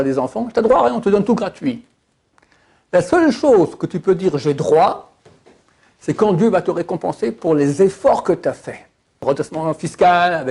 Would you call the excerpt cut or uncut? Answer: cut